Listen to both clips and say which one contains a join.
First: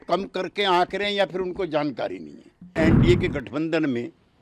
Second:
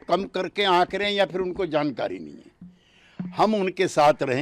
first; 1 cut; at 2.7 s

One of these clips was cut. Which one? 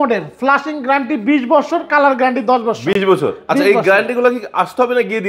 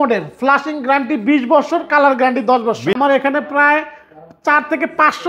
second; 1 cut; at 2.9 s

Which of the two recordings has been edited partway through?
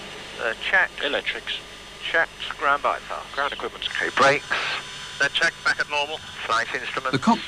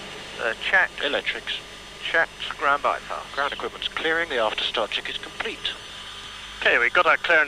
second; 1 cut; at 4.0 s

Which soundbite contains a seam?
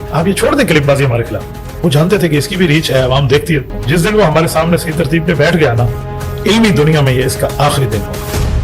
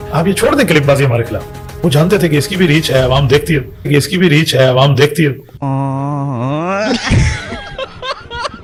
first; 1 cut; at 3.7 s

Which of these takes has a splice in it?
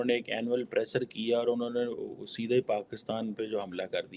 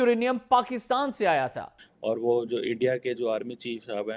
second; 1 cut; at 2.0 s

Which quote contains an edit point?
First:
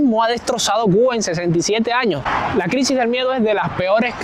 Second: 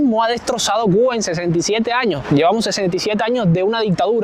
first; 1 cut; at 2.2 s

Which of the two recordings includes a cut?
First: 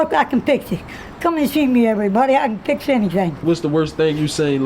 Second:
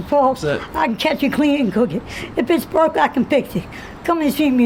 first; 1 cut; at 3.4 s

